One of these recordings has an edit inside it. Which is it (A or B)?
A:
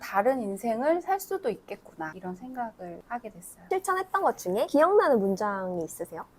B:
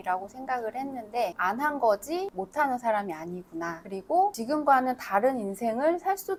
A